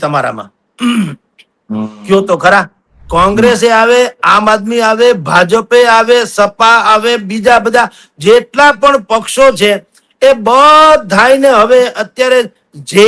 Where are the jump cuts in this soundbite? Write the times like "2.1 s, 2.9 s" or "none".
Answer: 3.0 s